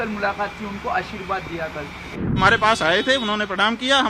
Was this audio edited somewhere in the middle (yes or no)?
yes